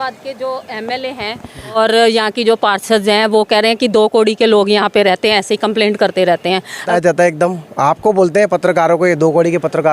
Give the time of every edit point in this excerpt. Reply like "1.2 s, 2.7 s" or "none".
1.8 s, 6.9 s